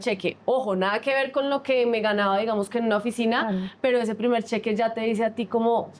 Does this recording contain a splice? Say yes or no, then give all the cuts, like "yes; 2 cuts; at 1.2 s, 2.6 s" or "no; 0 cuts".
no; 0 cuts